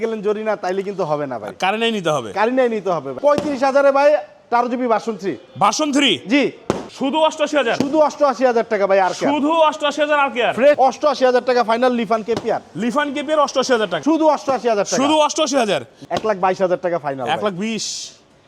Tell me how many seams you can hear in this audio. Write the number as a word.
five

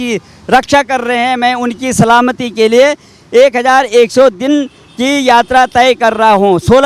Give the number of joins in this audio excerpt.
zero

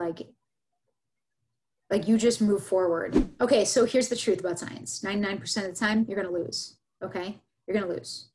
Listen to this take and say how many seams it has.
one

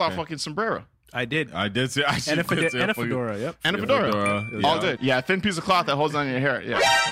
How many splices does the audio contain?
one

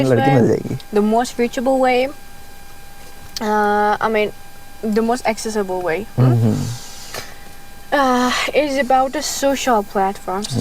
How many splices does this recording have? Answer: zero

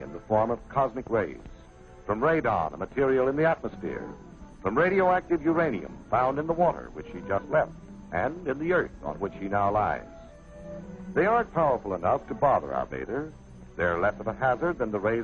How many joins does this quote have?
one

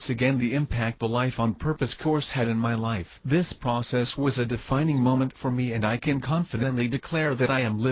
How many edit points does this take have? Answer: one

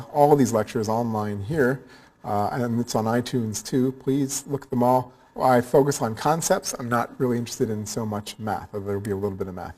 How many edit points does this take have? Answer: one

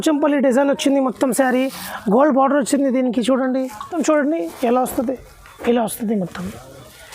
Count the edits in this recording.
one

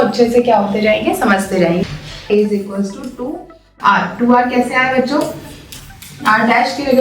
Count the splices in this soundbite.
one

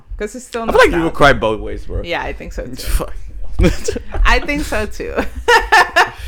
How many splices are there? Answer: zero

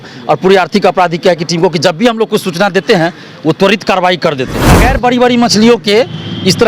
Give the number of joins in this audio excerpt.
one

